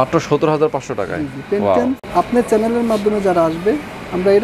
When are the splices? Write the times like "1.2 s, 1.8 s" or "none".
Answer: 2.0 s